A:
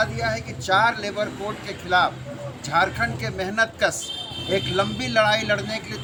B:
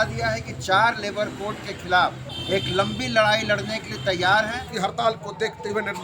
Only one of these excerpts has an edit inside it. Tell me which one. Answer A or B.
B